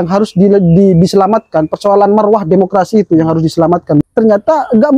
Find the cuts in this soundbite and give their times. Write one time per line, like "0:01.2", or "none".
0:04.0